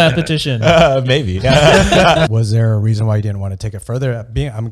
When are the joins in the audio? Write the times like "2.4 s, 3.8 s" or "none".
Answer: 2.3 s